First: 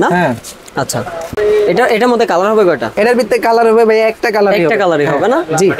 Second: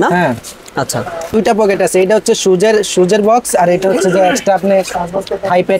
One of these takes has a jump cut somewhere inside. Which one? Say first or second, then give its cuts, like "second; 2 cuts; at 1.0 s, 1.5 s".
second; 1 cut; at 1.4 s